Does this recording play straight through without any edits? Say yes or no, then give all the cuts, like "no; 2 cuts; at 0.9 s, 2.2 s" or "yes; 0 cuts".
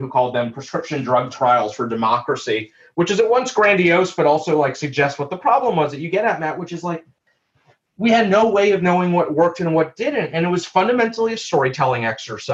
yes; 0 cuts